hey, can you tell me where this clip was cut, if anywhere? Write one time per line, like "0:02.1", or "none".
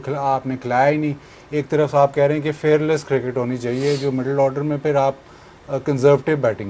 none